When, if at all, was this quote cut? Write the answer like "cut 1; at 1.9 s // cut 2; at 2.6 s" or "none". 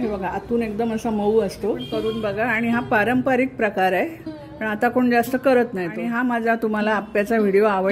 cut 1; at 1.8 s // cut 2; at 5.9 s